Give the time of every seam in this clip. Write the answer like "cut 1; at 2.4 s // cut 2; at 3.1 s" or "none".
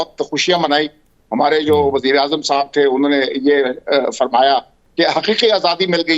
none